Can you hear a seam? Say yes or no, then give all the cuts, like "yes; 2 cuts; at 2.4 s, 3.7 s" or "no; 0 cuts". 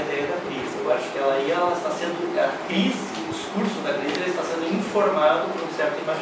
no; 0 cuts